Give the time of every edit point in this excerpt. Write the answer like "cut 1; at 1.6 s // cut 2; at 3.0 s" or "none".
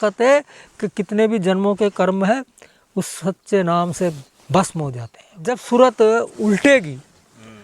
cut 1; at 5.6 s